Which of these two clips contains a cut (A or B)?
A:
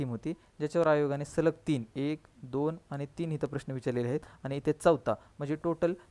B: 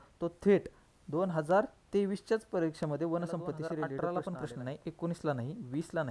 B